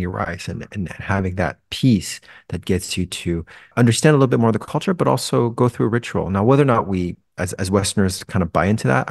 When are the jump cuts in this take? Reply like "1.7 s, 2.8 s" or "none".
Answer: 3.7 s